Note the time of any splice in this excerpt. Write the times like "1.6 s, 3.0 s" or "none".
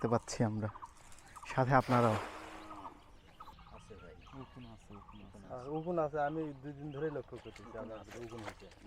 3.5 s